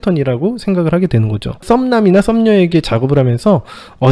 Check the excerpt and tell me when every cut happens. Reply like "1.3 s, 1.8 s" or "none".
1.6 s